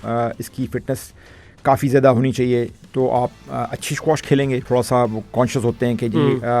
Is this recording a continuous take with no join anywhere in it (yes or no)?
no